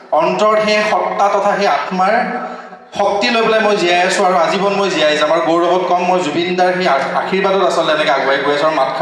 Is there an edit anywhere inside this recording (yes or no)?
no